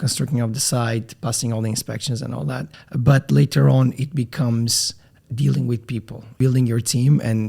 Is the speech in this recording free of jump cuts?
no; 2 cuts; at 2.8 s, 6.4 s

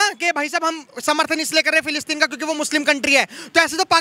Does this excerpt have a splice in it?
no; 0 cuts

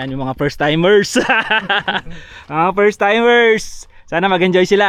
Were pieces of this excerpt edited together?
no; 0 cuts

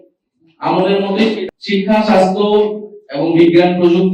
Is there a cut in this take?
yes; 1 cut; at 1.5 s

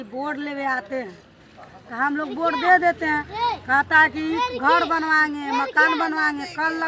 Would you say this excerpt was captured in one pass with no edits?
yes; 0 cuts

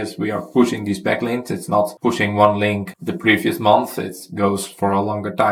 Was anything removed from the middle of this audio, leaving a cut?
no; 0 cuts

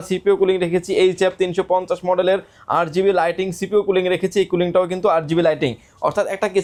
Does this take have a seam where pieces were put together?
no; 0 cuts

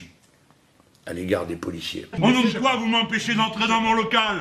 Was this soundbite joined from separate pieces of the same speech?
yes; 1 cut; at 2.0 s

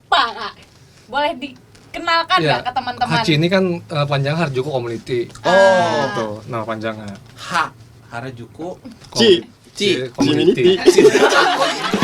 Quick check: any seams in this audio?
no; 0 cuts

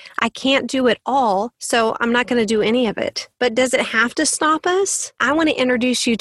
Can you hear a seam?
yes; 3 cuts; at 1.6 s, 3.2 s, 5.2 s

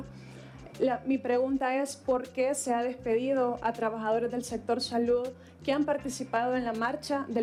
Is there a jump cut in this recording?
no; 0 cuts

